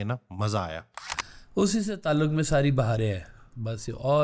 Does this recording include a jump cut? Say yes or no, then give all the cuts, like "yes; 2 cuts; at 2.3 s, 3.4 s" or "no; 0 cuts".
yes; 1 cut; at 1.4 s